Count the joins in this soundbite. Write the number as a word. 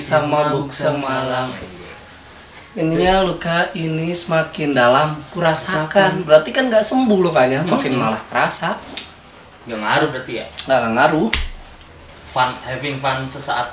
zero